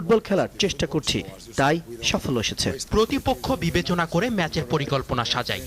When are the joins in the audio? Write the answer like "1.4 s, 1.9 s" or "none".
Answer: 2.8 s